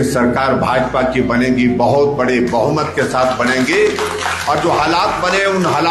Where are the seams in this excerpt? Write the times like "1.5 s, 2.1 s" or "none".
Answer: none

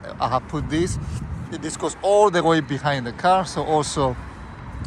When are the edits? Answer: none

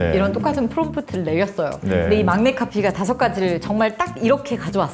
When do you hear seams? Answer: none

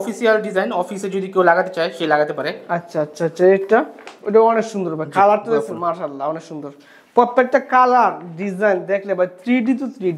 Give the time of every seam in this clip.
none

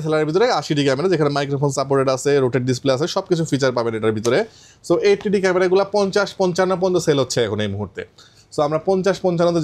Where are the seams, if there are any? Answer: none

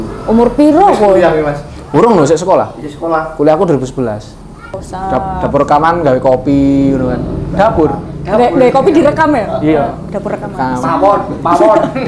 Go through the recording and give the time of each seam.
4.8 s

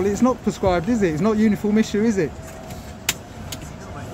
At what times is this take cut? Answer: 2.6 s

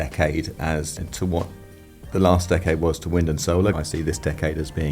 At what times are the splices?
1.0 s, 3.7 s

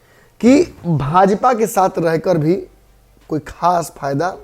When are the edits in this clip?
none

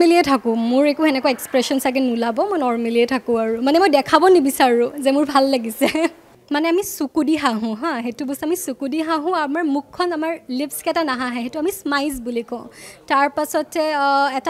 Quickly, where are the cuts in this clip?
6.3 s

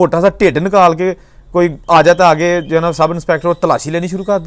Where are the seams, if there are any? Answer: none

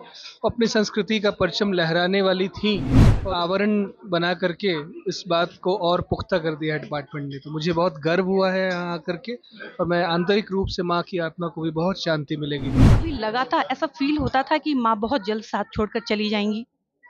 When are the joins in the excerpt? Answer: 3.2 s, 13.0 s

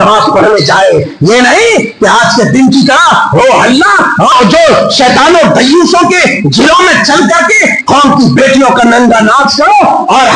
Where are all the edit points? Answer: 4.3 s

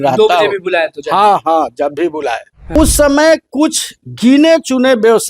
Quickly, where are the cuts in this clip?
2.7 s

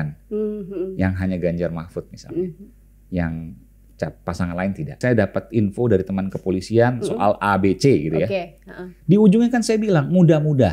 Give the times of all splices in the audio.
4.9 s

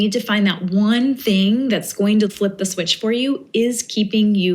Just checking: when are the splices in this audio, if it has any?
2.3 s

